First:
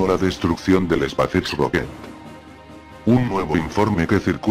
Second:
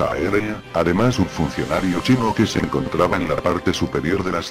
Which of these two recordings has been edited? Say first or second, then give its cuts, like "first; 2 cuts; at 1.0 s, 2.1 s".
second; 1 cut; at 1.3 s